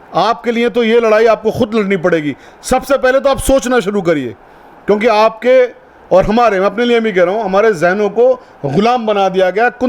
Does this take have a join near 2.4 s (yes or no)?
no